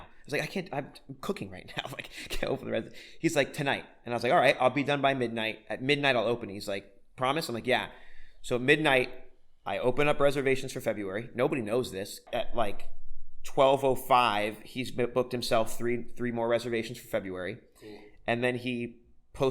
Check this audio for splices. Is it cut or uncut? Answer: cut